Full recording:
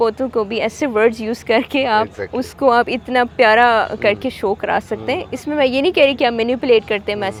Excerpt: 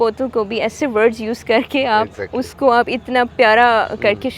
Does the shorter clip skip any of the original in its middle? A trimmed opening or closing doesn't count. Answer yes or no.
no